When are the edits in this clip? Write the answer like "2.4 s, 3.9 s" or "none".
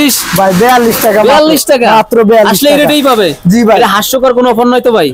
none